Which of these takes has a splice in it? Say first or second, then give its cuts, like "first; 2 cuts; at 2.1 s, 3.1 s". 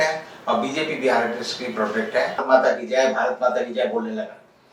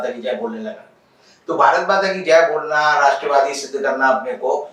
first; 1 cut; at 2.4 s